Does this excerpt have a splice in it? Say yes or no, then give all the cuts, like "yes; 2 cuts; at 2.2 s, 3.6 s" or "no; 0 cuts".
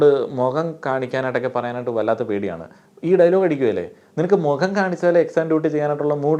no; 0 cuts